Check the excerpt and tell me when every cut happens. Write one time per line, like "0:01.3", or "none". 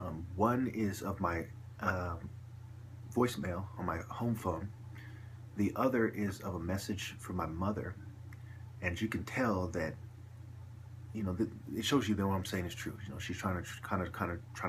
0:03.7

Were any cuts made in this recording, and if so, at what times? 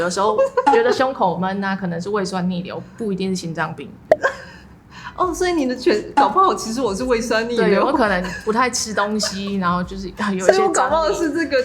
none

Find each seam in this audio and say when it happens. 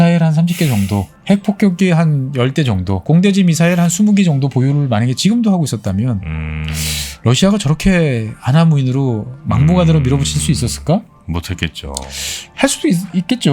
0:01.1
0:03.0

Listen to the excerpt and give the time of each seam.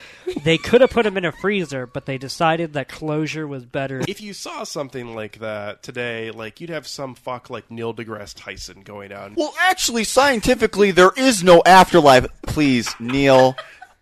0:04.1
0:09.2

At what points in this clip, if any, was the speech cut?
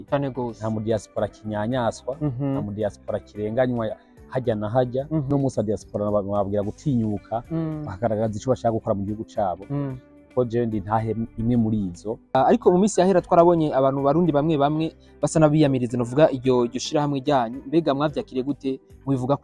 0:05.3
0:12.3

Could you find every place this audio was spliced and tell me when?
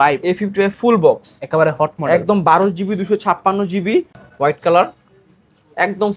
0:04.2

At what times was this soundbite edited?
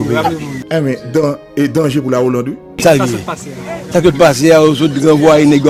none

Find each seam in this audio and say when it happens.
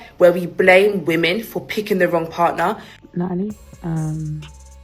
0:02.9

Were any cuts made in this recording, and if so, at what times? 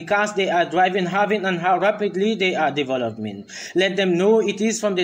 0:01.6

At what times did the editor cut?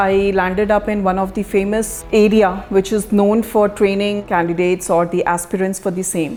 none

